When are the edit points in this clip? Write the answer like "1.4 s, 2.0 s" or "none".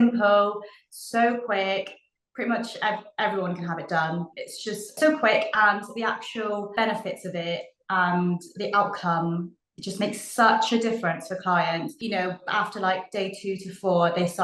4.4 s, 6.7 s, 11.9 s